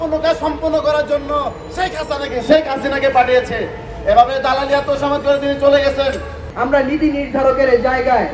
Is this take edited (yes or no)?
yes